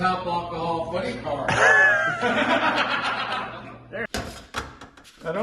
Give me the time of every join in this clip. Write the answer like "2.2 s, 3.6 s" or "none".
4.1 s